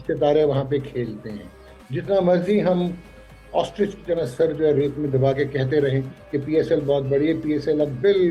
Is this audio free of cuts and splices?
yes; 0 cuts

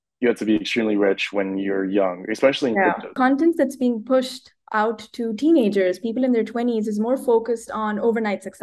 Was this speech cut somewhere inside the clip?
yes; 1 cut; at 3.1 s

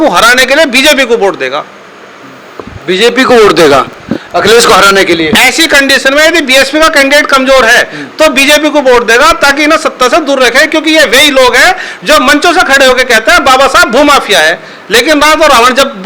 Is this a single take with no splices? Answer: yes; 0 cuts

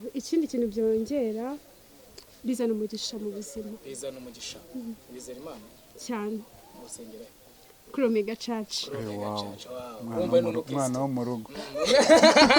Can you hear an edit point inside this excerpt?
no; 0 cuts

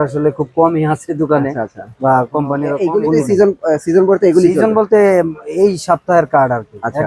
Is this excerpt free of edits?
no; 1 cut; at 2.7 s

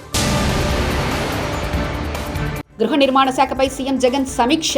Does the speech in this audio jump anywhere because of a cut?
yes; 1 cut; at 2.6 s

